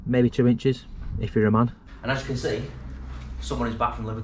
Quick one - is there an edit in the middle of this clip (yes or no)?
yes